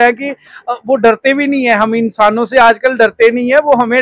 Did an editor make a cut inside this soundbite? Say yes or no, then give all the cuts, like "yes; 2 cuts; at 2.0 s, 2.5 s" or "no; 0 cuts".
no; 0 cuts